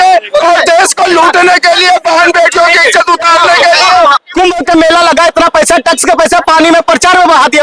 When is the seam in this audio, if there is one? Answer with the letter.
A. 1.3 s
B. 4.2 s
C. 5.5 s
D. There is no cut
B